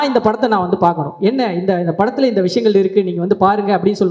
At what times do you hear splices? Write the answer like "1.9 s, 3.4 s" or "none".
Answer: none